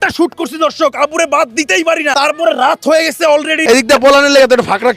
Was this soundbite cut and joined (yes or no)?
yes